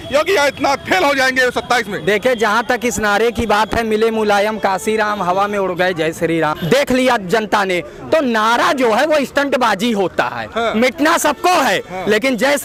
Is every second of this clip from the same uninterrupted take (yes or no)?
yes